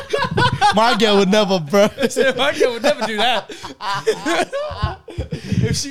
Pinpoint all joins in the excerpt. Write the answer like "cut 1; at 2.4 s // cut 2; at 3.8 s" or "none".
none